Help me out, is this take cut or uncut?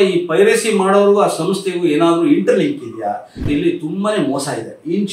cut